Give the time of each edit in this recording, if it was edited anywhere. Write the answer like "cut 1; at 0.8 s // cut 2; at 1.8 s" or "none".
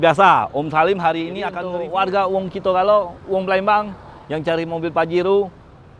cut 1; at 1.6 s